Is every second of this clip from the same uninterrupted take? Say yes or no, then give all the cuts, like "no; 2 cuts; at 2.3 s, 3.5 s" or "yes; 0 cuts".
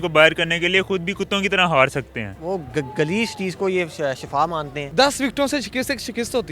no; 2 cuts; at 2.3 s, 4.8 s